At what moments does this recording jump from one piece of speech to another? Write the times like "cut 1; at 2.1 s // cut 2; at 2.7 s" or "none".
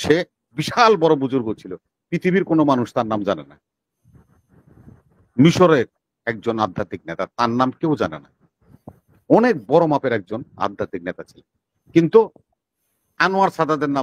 none